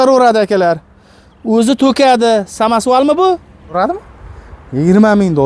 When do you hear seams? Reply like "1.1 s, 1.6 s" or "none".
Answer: 3.8 s

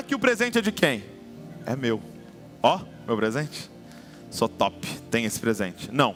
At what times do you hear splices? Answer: none

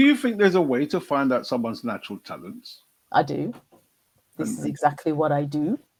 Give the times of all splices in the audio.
none

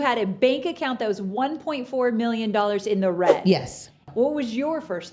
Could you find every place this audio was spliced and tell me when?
4.1 s

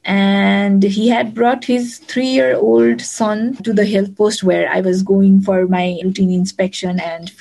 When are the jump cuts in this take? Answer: 6.0 s

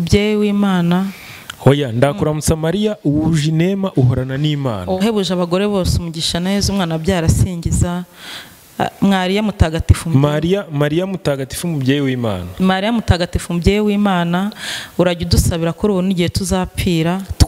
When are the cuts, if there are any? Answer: none

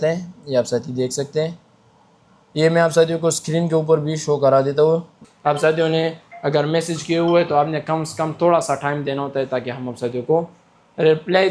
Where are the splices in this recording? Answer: 5.2 s

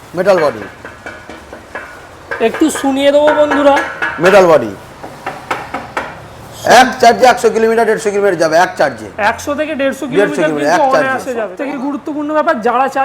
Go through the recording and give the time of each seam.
11.5 s

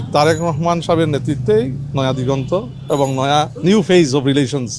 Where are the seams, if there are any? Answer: none

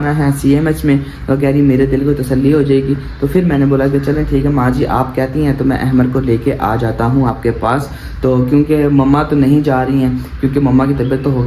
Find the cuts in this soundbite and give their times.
none

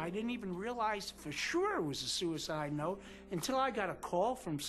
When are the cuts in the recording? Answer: none

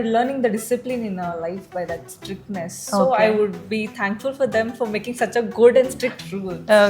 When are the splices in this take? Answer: none

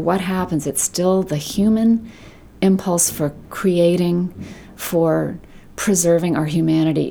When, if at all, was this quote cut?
none

